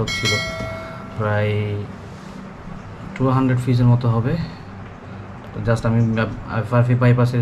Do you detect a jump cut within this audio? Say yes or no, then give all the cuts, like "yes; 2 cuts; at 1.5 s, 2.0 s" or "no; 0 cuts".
yes; 1 cut; at 5.3 s